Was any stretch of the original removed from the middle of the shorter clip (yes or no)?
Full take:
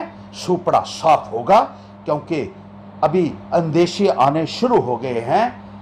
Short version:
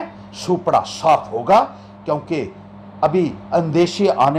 no